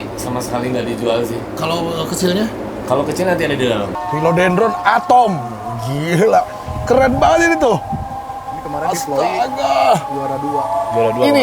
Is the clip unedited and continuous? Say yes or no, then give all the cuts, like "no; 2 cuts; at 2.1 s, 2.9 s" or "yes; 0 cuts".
no; 1 cut; at 4.0 s